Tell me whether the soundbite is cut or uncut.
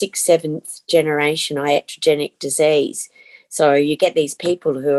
uncut